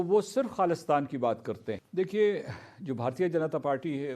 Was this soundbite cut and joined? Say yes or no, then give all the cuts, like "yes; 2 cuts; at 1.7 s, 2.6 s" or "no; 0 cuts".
yes; 1 cut; at 1.8 s